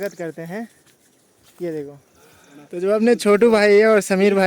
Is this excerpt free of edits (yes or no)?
yes